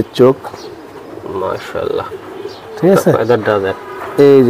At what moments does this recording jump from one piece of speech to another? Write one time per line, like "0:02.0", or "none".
none